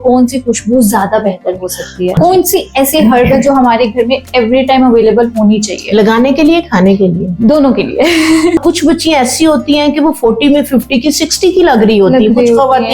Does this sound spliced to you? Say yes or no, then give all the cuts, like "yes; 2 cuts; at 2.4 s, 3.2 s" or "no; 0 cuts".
yes; 2 cuts; at 2.2 s, 8.6 s